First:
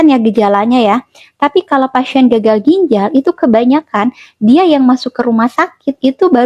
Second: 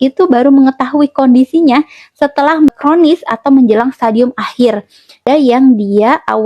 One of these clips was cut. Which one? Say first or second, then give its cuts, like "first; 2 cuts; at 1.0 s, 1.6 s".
second; 2 cuts; at 2.7 s, 5.2 s